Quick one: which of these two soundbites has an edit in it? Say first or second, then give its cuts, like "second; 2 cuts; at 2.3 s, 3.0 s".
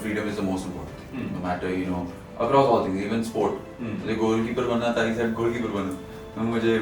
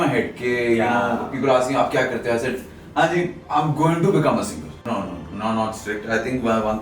second; 1 cut; at 4.8 s